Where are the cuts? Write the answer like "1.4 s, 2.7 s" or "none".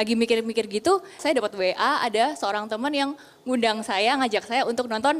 1.2 s